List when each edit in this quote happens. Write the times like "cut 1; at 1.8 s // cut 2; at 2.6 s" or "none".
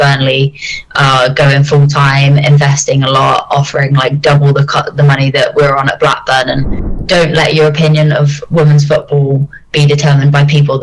cut 1; at 6.7 s

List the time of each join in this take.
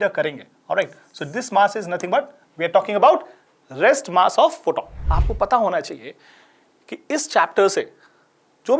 cut 1; at 5.1 s

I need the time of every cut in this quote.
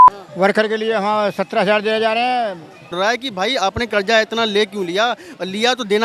cut 1; at 2.9 s

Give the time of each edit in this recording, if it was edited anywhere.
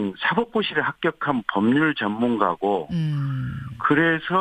cut 1; at 2.3 s

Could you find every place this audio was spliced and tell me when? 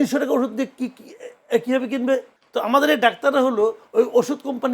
cut 1; at 2.4 s

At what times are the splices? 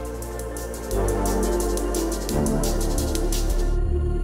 none

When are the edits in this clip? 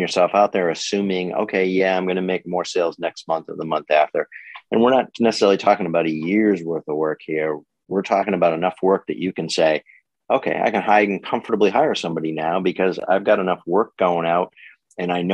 none

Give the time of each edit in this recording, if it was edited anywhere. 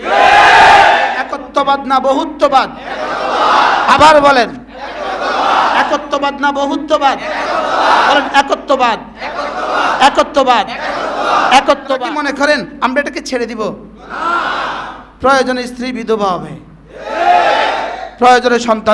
cut 1; at 1.1 s // cut 2; at 12.0 s

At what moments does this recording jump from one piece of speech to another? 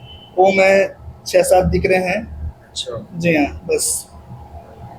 none

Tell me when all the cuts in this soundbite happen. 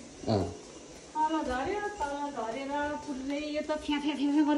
none

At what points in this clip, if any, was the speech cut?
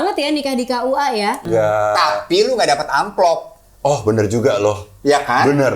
cut 1; at 1.4 s

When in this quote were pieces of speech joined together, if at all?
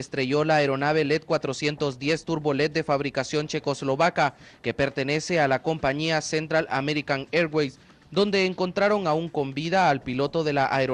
none

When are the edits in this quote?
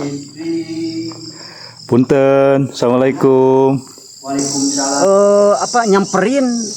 cut 1; at 4.9 s

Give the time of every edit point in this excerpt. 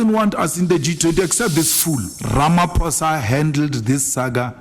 cut 1; at 2.2 s

